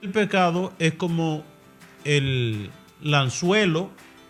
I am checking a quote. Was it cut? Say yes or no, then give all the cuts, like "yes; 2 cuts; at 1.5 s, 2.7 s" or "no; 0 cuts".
no; 0 cuts